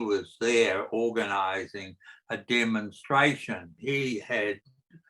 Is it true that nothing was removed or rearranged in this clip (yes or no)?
no